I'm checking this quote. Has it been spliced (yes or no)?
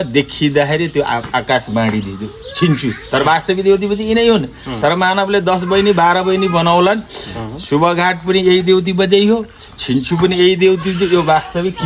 no